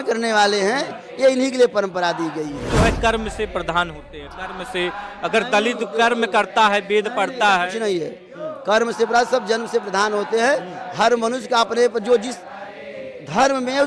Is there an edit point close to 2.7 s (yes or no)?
yes